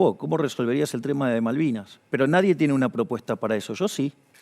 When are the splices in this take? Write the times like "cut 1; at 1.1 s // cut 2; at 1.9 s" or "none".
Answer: cut 1; at 2.0 s